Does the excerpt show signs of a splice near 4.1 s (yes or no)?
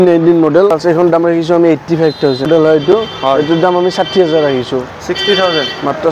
no